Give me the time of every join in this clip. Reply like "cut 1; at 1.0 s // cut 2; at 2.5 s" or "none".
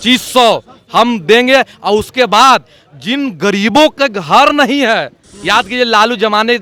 none